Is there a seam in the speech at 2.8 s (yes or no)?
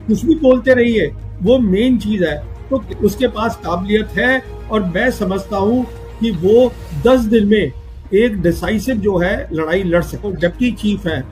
yes